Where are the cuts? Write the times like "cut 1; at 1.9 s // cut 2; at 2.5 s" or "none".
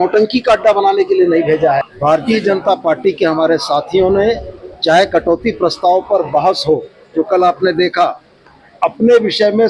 cut 1; at 1.9 s